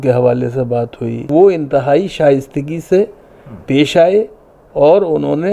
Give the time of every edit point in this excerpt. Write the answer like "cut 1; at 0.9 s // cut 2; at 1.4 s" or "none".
cut 1; at 1.3 s